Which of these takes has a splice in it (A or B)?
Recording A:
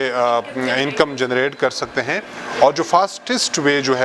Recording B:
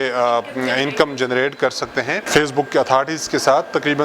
B